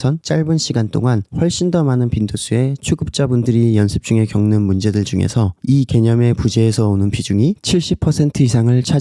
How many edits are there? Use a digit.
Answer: 1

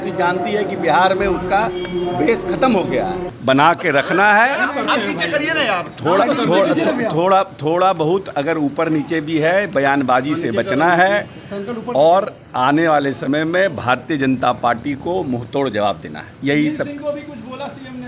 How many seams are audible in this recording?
1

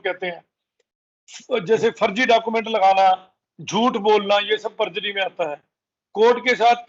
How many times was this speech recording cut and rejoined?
0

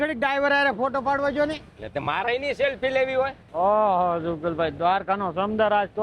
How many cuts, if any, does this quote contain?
1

